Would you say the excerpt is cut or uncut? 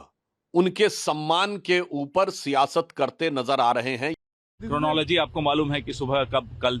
cut